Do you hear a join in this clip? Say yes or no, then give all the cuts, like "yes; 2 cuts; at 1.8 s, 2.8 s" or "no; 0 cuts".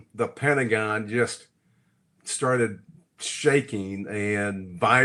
no; 0 cuts